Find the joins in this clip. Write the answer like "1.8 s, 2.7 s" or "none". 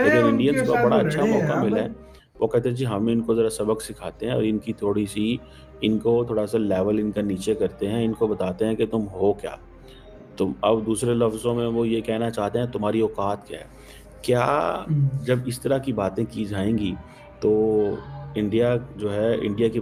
none